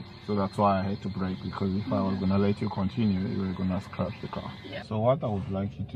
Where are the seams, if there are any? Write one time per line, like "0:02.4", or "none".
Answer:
0:04.8